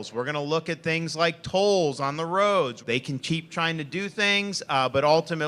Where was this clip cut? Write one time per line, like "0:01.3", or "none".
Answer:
0:02.8